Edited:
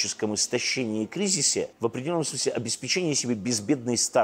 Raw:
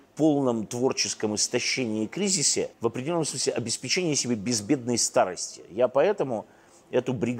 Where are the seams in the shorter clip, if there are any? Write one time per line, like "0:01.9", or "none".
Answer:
none

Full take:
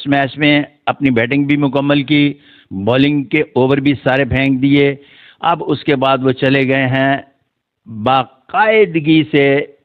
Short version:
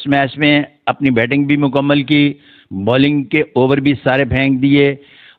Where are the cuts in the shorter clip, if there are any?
none

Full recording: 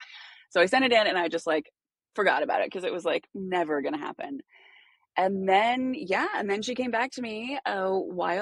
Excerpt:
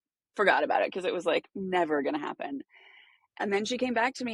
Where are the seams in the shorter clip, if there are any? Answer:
0:03.3

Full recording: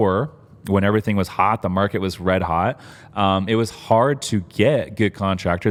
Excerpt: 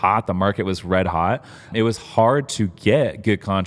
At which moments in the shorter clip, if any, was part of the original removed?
0:01.7

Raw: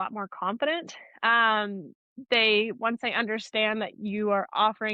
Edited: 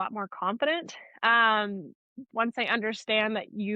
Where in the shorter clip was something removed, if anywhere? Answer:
0:02.3

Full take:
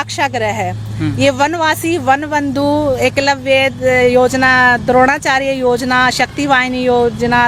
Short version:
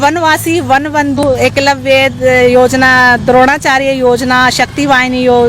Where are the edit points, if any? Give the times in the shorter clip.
0:01.2

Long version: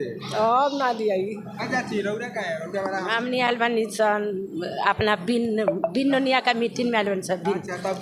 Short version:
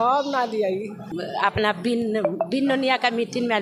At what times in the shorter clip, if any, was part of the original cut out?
0:01.1

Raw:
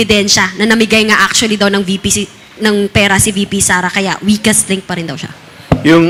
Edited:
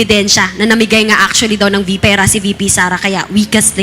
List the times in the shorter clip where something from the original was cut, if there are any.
0:02.0

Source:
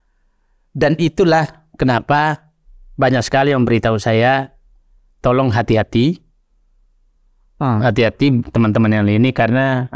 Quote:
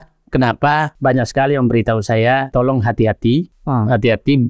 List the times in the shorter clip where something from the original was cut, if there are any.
0:00.9
0:02.5
0:03.6

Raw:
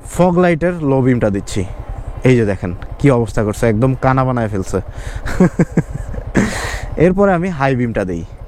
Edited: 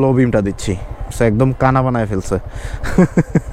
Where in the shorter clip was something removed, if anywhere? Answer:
0:01.1

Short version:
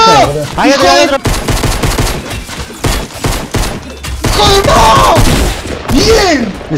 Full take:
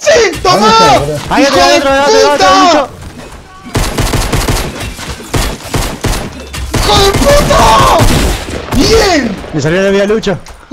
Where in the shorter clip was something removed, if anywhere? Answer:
0:01.2
0:04.6

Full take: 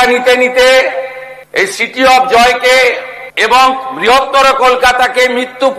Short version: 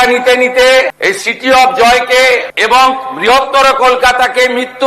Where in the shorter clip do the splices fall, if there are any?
0:00.9
0:02.5

